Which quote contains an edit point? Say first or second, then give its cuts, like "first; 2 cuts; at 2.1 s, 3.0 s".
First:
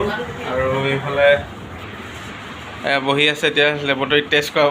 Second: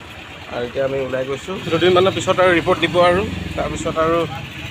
second; 1 cut; at 1.6 s